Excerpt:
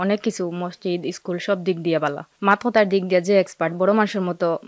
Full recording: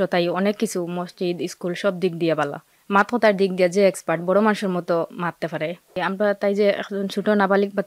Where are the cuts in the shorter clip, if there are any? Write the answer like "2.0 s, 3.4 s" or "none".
2.3 s